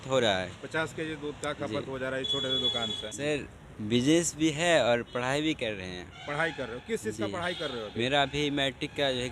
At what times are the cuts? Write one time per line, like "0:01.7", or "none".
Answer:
0:03.1

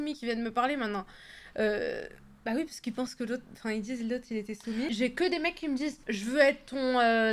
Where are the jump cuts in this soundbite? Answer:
0:04.9

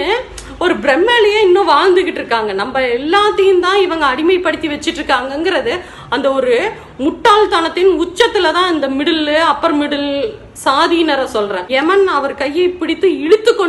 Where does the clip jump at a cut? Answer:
0:11.6

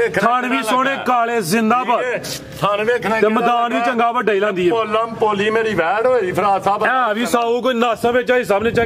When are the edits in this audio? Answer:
none

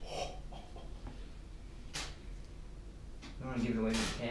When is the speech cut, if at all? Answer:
none

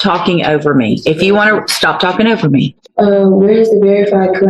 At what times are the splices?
0:02.8

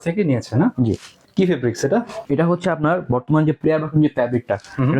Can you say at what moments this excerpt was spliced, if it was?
0:01.1
0:02.2

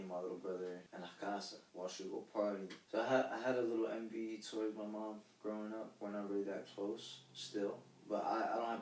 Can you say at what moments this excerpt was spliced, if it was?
0:00.9
0:01.6
0:02.8

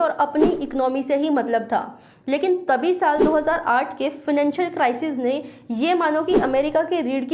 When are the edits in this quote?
none

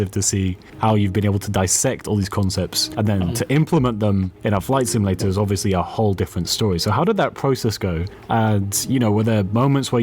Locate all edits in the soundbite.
0:02.8

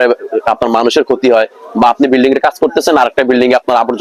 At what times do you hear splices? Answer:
none

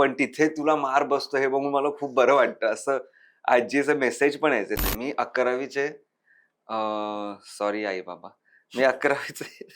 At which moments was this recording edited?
0:04.8

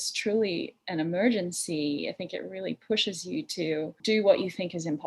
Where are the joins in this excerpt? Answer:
0:04.0

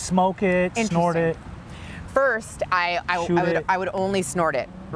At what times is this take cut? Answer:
none

